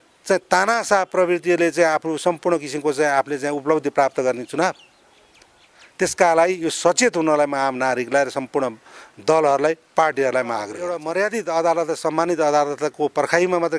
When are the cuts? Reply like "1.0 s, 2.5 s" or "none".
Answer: 11.0 s